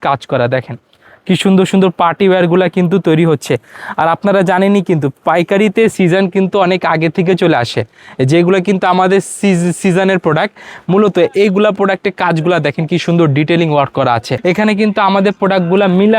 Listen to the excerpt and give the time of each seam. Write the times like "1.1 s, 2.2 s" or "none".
14.3 s